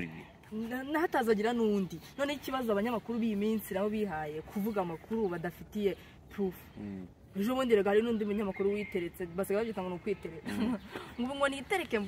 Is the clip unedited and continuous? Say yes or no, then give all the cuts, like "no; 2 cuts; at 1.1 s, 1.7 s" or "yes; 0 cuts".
yes; 0 cuts